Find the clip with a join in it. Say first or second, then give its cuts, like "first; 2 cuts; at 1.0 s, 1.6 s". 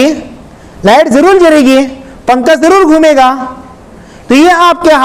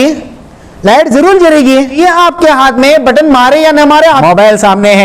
second; 2 cuts; at 2.0 s, 4.2 s